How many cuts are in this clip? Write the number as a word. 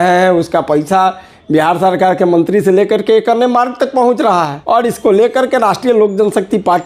one